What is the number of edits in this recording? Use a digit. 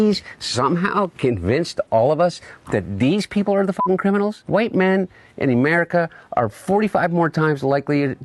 1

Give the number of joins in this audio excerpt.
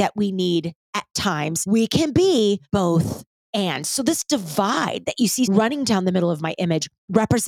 3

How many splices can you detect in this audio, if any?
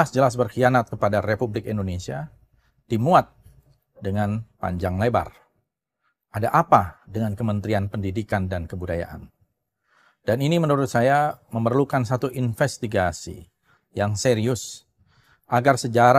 0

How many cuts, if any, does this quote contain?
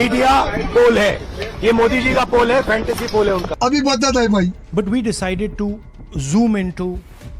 0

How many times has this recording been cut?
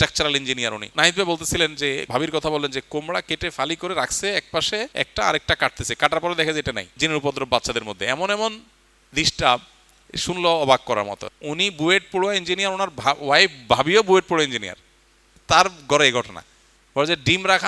5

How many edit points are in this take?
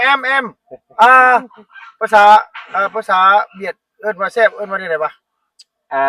0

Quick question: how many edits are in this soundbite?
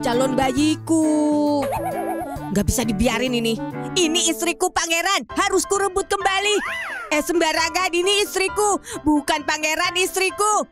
0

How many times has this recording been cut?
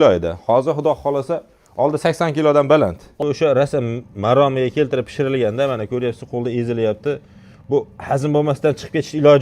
1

